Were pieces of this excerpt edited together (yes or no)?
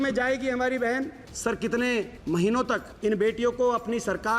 yes